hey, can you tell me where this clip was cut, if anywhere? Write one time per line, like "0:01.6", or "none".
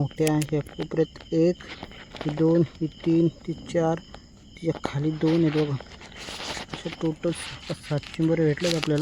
none